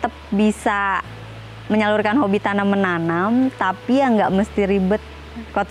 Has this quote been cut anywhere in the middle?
no; 0 cuts

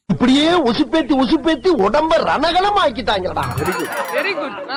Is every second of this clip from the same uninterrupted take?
yes; 0 cuts

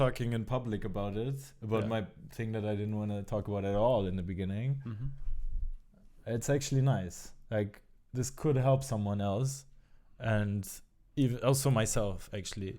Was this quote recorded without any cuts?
yes; 0 cuts

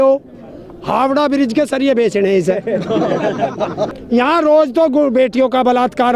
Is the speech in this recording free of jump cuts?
no; 1 cut; at 3.9 s

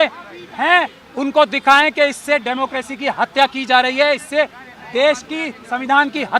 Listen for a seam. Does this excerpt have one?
no; 0 cuts

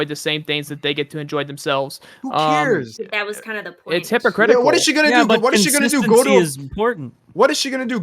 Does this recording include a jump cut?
yes; 1 cut; at 3.0 s

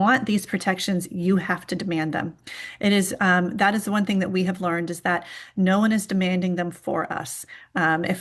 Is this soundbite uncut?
yes; 0 cuts

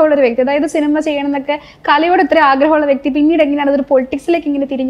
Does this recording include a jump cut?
no; 0 cuts

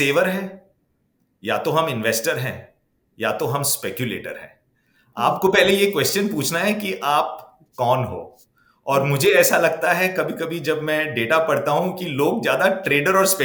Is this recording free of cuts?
yes; 0 cuts

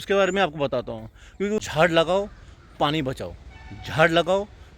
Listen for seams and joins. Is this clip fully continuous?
no; 1 cut; at 1.6 s

